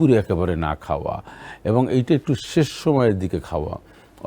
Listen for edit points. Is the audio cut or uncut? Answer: uncut